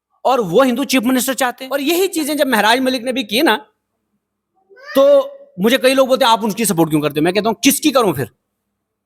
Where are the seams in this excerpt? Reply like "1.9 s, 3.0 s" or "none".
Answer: 1.6 s